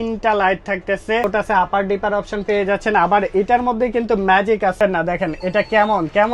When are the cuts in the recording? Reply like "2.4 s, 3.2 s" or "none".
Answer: 1.2 s, 4.8 s